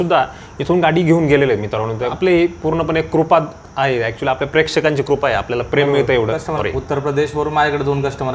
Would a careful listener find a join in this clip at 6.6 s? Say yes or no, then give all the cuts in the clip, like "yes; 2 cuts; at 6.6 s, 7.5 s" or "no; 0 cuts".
yes; 2 cuts; at 2.1 s, 6.6 s